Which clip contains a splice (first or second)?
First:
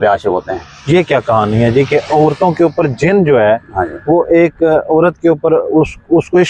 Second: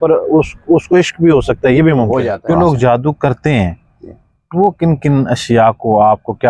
second